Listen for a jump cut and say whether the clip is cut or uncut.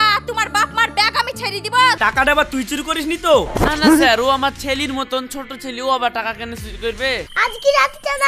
cut